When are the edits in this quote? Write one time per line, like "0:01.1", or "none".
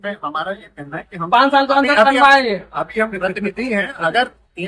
none